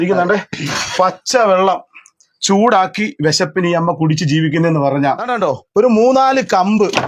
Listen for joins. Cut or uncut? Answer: cut